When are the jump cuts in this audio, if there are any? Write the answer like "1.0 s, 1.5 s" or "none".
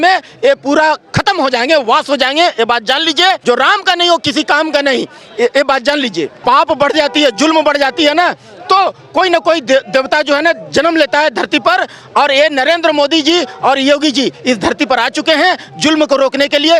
3.4 s, 6.3 s